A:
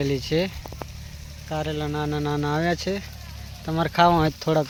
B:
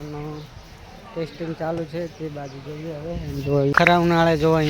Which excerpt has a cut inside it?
B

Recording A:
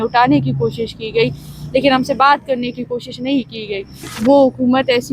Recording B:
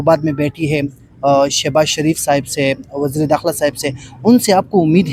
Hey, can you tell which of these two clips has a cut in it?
A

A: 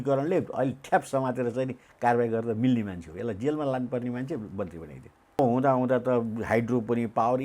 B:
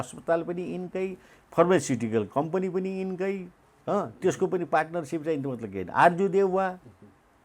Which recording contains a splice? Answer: A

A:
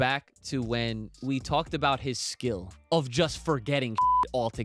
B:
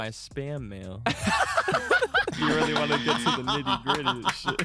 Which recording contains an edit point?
A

